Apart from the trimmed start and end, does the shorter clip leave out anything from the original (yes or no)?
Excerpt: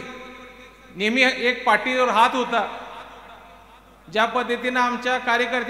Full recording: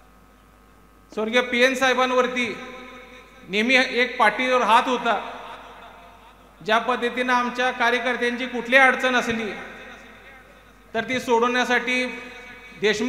no